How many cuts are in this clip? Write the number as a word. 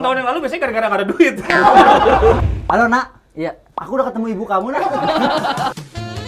one